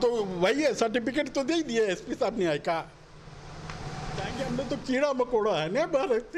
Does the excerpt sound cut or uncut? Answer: cut